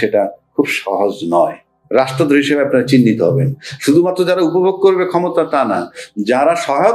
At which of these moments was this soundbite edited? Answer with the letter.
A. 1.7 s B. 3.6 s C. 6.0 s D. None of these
A